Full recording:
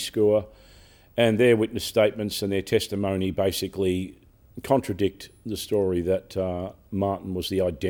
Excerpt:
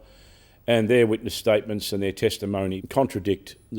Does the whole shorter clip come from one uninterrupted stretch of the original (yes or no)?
no